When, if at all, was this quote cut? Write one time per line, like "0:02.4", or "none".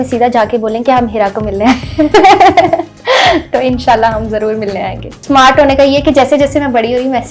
0:05.2